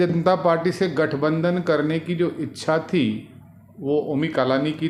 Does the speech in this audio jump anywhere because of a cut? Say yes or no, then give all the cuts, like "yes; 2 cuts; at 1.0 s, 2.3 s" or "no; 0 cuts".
no; 0 cuts